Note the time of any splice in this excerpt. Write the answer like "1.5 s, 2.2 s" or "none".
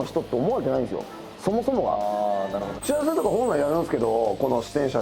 2.8 s